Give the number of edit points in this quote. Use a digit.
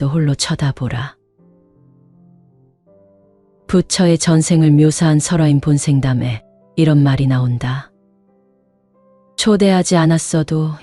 2